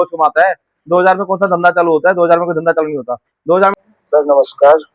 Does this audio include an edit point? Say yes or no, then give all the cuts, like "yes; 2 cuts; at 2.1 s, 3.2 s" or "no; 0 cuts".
yes; 1 cut; at 3.7 s